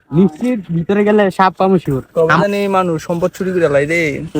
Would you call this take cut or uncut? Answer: cut